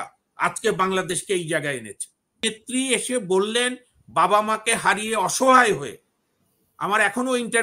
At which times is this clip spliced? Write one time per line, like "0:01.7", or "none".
0:02.4